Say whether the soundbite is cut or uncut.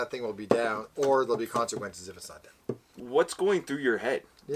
cut